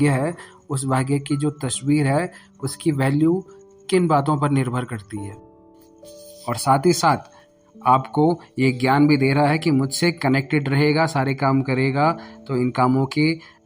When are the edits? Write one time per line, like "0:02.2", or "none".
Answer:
0:05.8